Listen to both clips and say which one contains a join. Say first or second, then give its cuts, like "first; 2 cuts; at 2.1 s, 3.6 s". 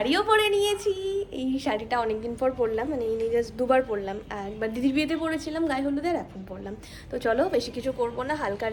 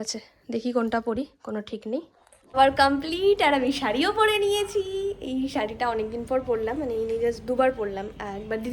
second; 1 cut; at 2.5 s